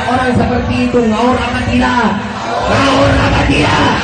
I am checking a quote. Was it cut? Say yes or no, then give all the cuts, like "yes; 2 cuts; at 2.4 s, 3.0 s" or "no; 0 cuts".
no; 0 cuts